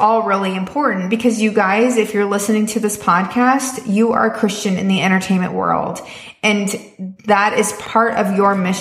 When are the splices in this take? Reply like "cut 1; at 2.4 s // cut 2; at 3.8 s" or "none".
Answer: cut 1; at 7.8 s